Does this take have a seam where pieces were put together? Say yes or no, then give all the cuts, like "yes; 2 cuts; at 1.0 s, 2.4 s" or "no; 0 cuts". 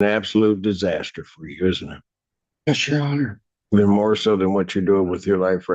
no; 0 cuts